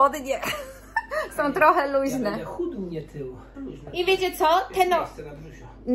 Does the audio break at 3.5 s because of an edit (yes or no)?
yes